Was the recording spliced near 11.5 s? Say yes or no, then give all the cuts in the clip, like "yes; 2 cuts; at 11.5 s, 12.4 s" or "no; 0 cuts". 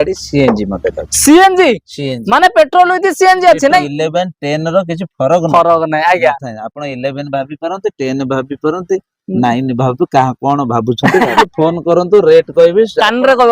yes; 2 cuts; at 3.8 s, 11.5 s